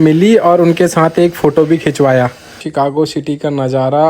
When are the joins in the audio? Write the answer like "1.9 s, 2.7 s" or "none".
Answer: 2.6 s

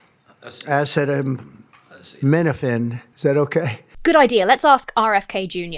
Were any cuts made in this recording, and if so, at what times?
3.0 s, 3.8 s

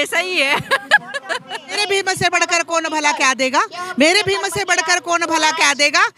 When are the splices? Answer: 1.8 s

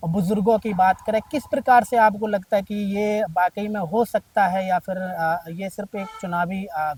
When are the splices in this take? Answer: none

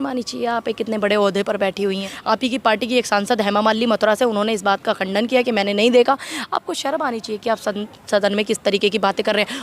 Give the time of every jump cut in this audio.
2.1 s

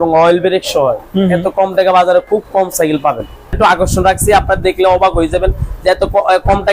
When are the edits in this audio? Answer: 3.5 s

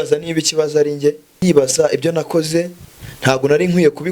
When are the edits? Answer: 1.4 s

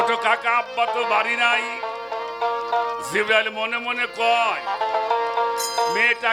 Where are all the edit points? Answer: none

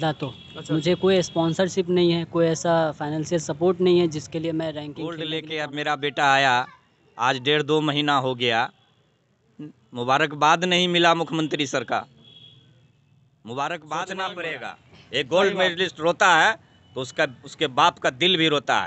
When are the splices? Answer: 5.2 s, 14.1 s

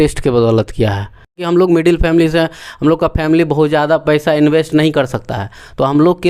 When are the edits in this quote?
1.4 s

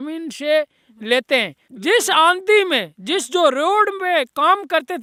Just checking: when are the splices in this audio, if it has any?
none

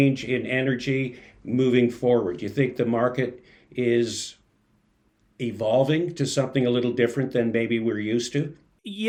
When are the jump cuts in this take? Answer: none

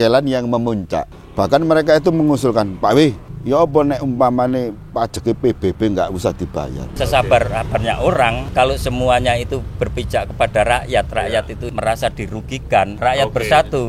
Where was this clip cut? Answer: 1.2 s, 3.3 s, 6.9 s, 8.4 s, 11.6 s, 12.9 s

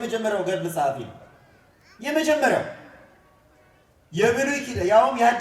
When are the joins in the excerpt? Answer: none

